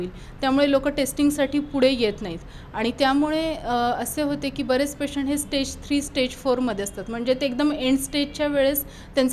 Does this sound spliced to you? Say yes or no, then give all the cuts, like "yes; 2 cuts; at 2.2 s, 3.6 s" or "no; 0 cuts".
no; 0 cuts